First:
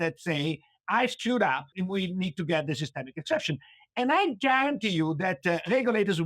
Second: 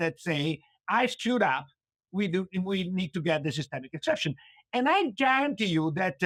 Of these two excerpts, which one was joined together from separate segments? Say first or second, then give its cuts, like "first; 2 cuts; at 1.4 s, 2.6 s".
first; 1 cut; at 1.7 s